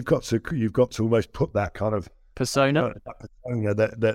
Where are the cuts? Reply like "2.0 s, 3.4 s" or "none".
2.2 s